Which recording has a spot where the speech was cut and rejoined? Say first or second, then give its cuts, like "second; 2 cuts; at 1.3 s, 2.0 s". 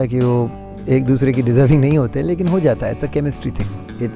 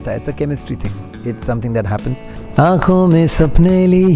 second; 1 cut; at 2.3 s